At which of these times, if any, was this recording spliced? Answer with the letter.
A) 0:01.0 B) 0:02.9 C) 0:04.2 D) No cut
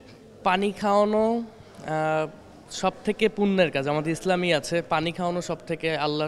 D